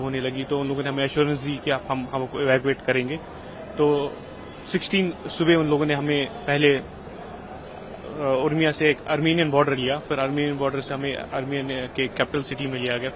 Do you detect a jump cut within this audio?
no; 0 cuts

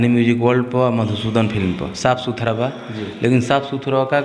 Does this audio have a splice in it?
no; 0 cuts

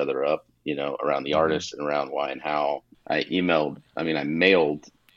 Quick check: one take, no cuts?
no; 1 cut; at 2.9 s

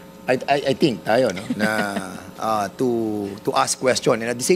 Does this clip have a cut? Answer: no; 0 cuts

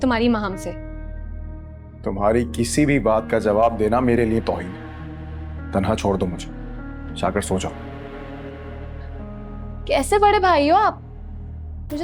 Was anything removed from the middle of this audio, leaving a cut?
no; 0 cuts

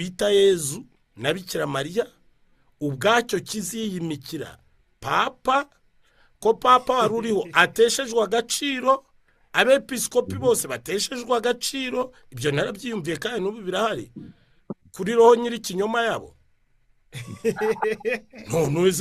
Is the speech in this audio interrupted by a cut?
no; 0 cuts

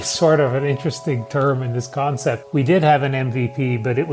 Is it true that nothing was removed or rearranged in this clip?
no; 1 cut; at 2.4 s

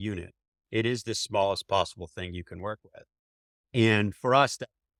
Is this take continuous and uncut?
yes; 0 cuts

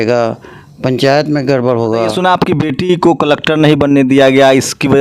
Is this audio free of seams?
no; 1 cut; at 2.2 s

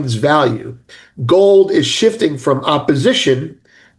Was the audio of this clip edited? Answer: no; 0 cuts

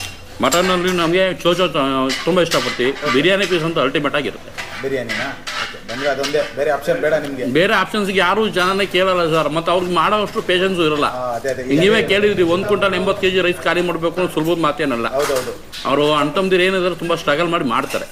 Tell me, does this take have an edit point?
no; 0 cuts

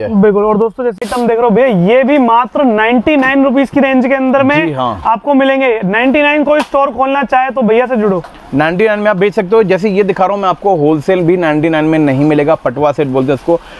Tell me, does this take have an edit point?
yes; 1 cut; at 1.0 s

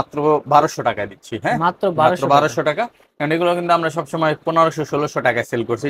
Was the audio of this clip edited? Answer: no; 0 cuts

